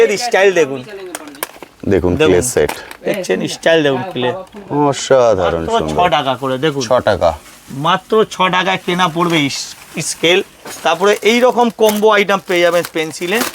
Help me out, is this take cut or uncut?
cut